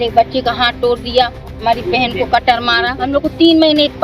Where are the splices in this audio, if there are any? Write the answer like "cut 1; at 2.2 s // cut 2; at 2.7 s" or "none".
cut 1; at 3.0 s